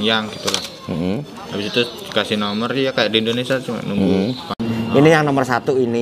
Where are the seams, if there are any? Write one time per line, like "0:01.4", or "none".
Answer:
0:04.6